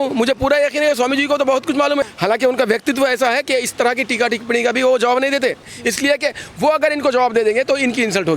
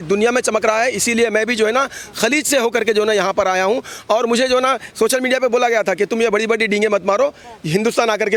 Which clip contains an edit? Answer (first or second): first